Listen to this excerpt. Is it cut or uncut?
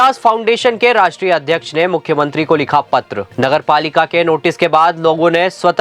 cut